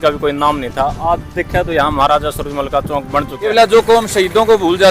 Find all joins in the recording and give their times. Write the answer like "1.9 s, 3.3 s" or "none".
3.4 s